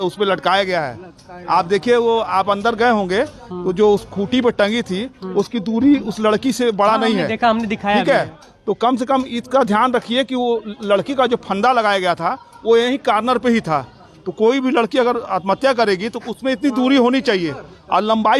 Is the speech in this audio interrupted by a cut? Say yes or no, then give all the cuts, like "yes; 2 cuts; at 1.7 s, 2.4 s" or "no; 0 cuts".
no; 0 cuts